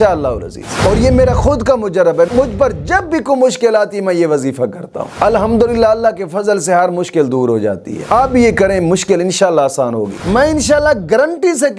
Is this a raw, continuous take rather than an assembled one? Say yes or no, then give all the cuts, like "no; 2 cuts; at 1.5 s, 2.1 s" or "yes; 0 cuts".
no; 2 cuts; at 8.0 s, 10.2 s